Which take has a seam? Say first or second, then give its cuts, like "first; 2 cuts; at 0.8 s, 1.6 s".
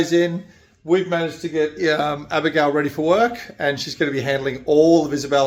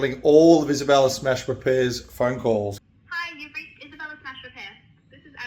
second; 1 cut; at 2.8 s